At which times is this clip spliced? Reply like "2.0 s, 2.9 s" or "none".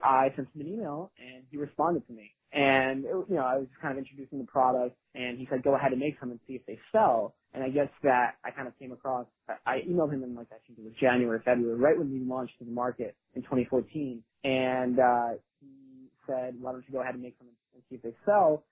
none